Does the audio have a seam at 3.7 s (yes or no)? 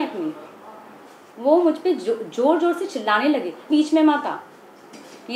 yes